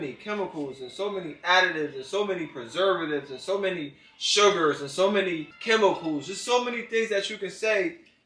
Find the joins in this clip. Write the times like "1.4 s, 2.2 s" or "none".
none